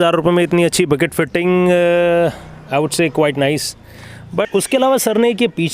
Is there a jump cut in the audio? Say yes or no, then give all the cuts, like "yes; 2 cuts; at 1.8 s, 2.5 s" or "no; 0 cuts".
yes; 1 cut; at 4.5 s